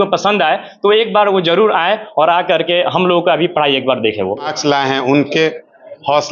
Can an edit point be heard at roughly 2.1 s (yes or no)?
no